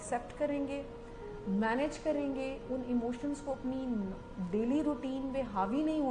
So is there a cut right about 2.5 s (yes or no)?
no